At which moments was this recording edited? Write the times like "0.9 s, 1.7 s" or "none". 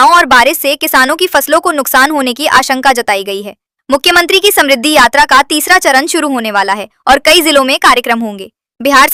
none